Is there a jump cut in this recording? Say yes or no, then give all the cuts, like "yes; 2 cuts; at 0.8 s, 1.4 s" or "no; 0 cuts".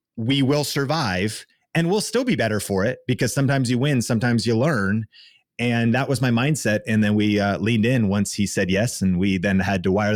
no; 0 cuts